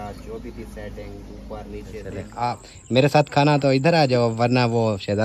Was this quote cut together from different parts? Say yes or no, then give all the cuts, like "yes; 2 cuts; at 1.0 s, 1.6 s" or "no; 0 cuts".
yes; 1 cut; at 2.2 s